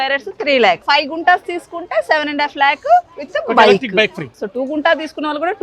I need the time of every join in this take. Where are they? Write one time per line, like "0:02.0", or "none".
0:00.8
0:04.4